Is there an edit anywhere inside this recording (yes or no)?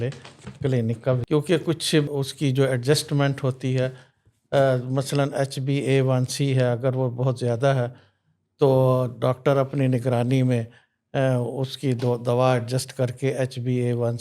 yes